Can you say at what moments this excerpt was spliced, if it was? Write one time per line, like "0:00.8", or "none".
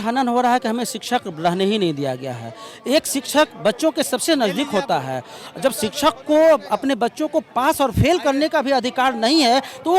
none